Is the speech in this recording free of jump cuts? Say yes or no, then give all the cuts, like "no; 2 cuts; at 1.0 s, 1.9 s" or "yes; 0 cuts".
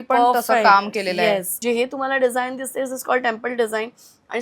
no; 1 cut; at 1.5 s